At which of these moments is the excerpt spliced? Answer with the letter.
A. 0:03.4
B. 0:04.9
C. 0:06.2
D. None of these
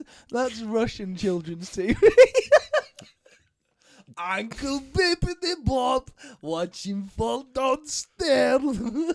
D